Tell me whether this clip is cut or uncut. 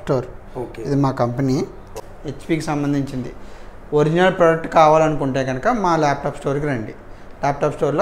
uncut